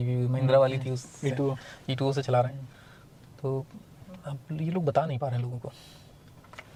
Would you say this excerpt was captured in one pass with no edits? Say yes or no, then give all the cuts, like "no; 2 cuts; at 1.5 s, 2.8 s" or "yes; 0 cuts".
yes; 0 cuts